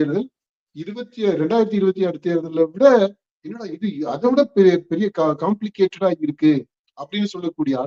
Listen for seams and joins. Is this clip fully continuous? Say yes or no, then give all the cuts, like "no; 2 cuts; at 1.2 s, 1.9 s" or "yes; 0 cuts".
yes; 0 cuts